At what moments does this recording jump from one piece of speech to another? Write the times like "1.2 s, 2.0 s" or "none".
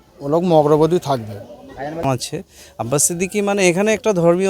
2.0 s